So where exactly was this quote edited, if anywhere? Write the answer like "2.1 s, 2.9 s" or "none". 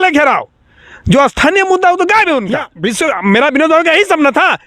2.7 s